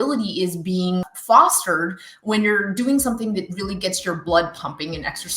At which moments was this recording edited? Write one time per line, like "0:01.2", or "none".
0:01.1